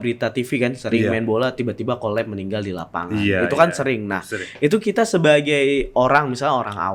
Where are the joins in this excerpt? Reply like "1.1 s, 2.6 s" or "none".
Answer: none